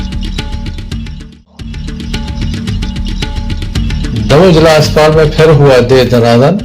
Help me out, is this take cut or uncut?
cut